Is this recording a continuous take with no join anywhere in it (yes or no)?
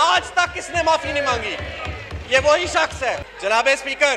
yes